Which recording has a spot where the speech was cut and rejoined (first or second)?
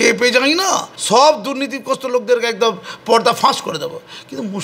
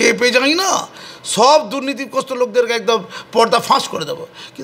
first